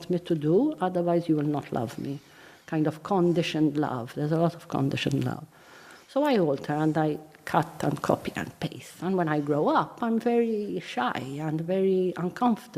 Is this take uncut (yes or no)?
yes